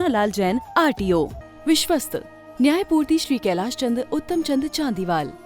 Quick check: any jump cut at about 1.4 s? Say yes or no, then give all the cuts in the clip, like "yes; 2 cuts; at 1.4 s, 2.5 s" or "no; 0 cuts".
yes; 1 cut; at 1.4 s